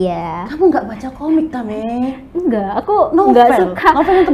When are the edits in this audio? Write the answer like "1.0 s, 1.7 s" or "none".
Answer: none